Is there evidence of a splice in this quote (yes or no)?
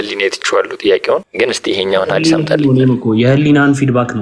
yes